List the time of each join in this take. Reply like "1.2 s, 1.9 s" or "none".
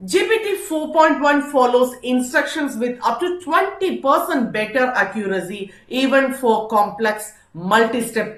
none